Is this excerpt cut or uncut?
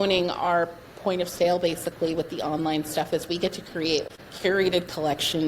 cut